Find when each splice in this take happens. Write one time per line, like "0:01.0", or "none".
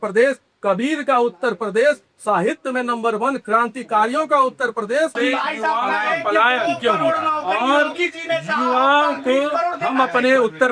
0:05.1